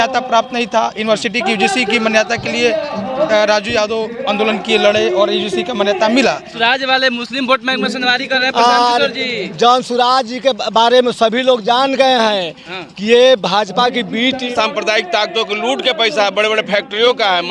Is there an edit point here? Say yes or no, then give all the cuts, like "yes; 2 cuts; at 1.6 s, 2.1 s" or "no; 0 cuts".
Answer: yes; 2 cuts; at 6.5 s, 14.4 s